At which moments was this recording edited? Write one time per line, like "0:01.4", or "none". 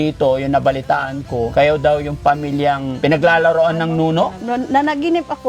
0:01.5
0:02.9
0:04.4